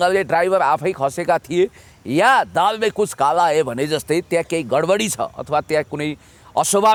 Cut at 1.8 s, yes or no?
no